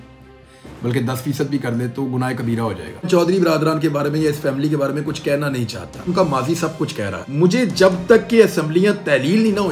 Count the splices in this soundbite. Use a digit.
3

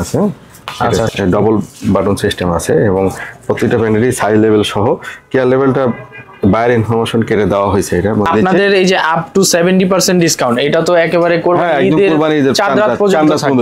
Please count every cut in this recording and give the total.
2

